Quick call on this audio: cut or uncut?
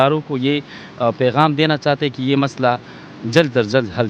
uncut